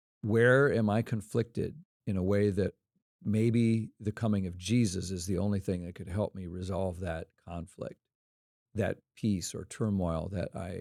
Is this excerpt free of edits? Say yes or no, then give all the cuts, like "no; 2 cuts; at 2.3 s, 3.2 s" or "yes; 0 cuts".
yes; 0 cuts